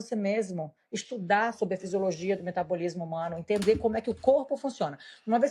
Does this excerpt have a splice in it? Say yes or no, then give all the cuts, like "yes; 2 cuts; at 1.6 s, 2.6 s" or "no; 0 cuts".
no; 0 cuts